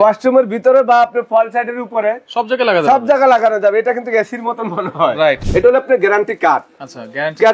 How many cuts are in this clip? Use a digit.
1